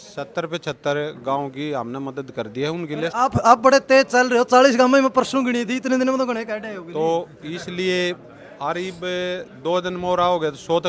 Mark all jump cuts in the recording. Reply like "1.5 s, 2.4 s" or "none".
none